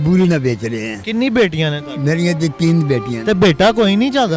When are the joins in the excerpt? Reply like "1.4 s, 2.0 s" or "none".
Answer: none